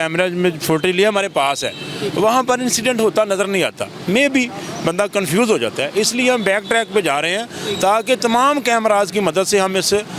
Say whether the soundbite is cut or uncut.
uncut